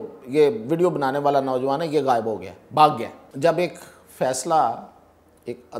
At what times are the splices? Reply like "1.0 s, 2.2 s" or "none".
3.2 s